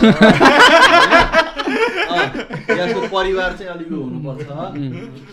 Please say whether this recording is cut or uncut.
uncut